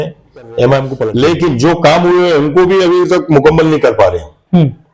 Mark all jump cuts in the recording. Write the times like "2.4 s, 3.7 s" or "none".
1.0 s